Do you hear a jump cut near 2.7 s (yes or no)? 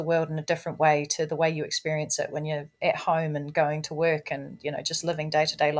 no